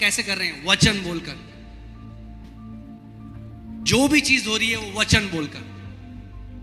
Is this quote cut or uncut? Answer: uncut